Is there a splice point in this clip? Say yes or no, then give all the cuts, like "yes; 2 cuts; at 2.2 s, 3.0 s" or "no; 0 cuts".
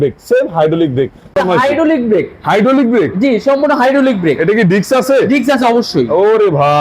yes; 1 cut; at 1.3 s